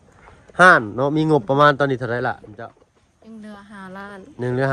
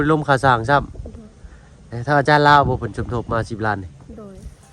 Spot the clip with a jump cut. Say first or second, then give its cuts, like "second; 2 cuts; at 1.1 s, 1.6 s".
first; 1 cut; at 2.5 s